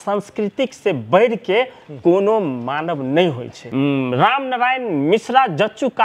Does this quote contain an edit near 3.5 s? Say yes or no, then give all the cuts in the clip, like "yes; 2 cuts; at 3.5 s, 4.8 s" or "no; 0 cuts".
yes; 1 cut; at 3.5 s